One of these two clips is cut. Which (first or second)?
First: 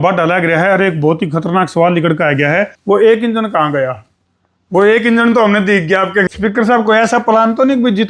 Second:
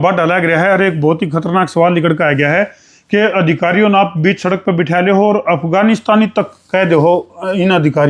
first